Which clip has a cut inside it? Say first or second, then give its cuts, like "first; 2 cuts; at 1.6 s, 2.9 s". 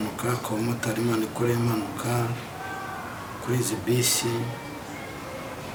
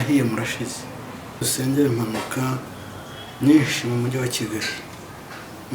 second; 1 cut; at 1.5 s